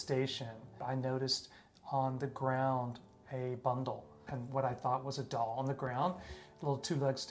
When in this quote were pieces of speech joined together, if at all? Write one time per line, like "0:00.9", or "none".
0:00.7
0:04.2